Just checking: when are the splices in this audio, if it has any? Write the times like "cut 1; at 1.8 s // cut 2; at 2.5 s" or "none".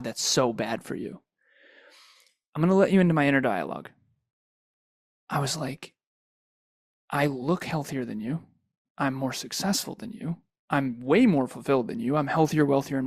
none